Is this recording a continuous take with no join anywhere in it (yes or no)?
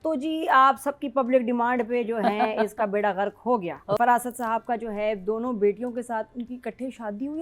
no